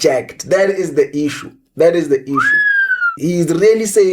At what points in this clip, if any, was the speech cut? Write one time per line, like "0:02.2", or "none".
0:03.2